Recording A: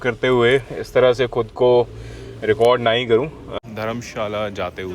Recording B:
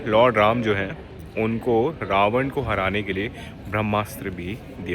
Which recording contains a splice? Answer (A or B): A